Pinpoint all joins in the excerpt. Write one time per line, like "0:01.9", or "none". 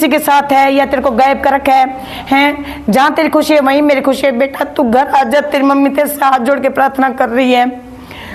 none